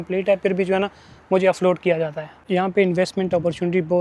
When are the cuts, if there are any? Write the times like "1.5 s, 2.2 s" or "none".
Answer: 2.4 s